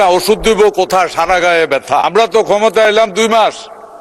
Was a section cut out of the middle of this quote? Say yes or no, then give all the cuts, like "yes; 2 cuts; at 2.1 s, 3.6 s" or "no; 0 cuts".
yes; 1 cut; at 2.1 s